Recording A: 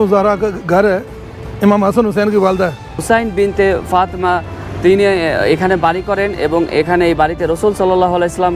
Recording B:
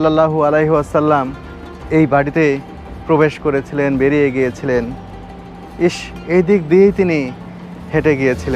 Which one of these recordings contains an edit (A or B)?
A